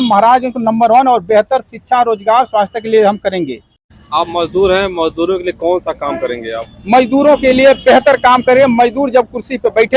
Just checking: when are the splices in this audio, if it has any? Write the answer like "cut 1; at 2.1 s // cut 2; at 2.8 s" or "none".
cut 1; at 3.9 s